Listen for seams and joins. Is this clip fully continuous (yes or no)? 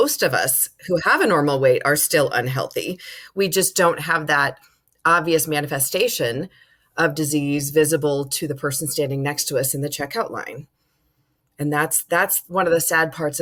yes